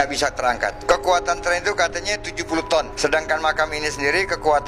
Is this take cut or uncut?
uncut